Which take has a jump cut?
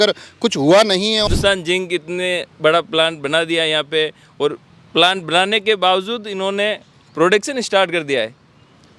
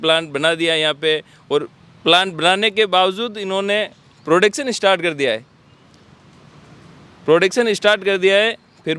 first; 1 cut; at 1.3 s

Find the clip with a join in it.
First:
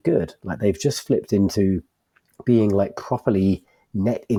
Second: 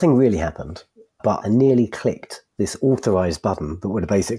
second; 1 cut; at 1.2 s

